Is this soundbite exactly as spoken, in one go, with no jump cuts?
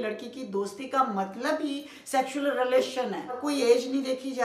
no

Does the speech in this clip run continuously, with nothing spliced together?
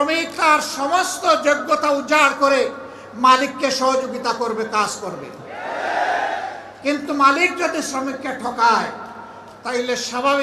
yes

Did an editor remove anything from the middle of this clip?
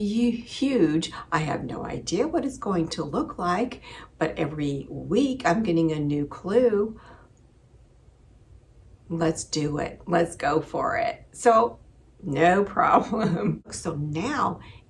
yes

